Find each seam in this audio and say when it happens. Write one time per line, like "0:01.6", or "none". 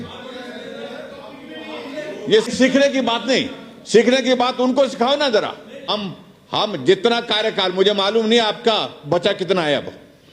0:02.5
0:05.9